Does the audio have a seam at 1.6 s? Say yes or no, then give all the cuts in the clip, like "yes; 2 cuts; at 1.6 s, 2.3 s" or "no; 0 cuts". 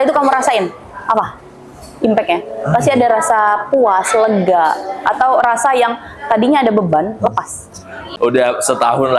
no; 1 cut; at 8.0 s